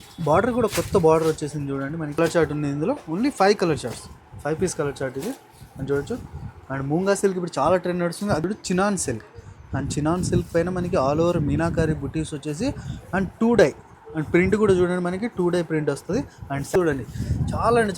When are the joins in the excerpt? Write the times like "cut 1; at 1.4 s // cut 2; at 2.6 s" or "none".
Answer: cut 1; at 2.2 s // cut 2; at 8.4 s // cut 3; at 16.7 s